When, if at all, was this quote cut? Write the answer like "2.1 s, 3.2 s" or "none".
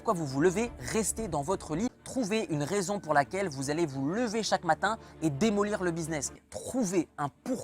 2.0 s, 6.5 s